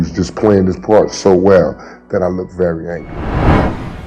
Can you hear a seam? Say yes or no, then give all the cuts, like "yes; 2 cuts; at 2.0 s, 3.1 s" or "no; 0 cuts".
yes; 1 cut; at 3.1 s